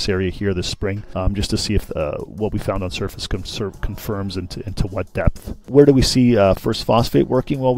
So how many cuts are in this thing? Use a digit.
2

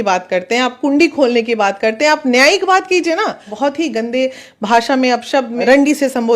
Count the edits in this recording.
2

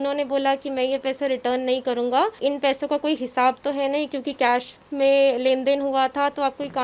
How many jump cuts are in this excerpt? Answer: 1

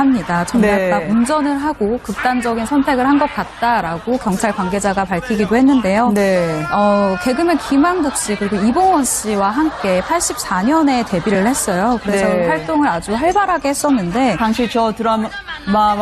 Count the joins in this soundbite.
1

